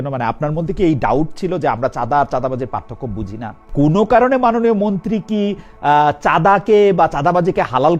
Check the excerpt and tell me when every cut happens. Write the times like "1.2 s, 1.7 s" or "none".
3.6 s

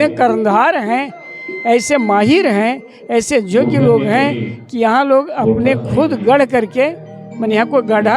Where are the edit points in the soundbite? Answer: none

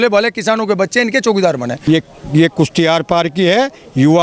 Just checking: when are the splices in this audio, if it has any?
1.7 s

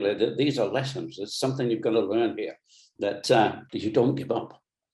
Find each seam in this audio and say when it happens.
3.7 s

